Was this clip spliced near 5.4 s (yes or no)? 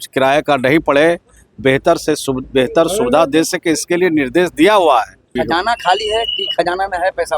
yes